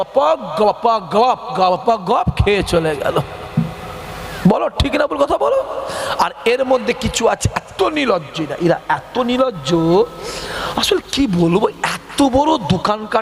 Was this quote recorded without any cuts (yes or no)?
yes